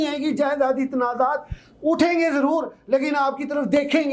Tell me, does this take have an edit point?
no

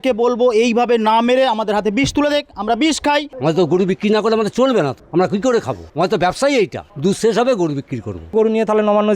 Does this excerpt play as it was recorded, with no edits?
no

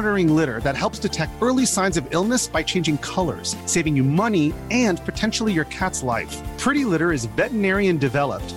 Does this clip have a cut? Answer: no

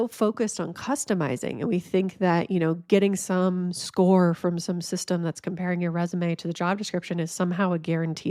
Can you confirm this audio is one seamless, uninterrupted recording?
yes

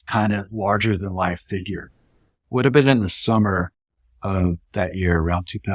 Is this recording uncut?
no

